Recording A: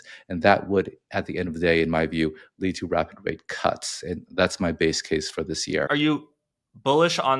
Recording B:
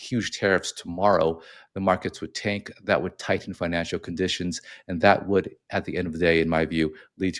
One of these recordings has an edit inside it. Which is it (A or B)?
A